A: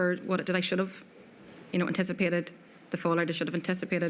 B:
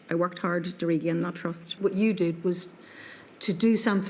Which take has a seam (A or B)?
B